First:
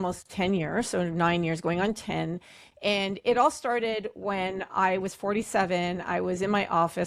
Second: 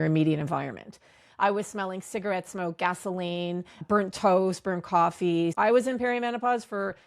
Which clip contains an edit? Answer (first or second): second